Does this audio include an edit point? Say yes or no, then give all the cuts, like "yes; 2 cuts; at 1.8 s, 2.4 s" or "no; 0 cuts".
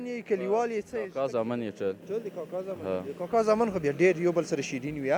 no; 0 cuts